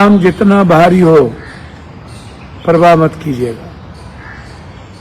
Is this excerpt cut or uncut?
uncut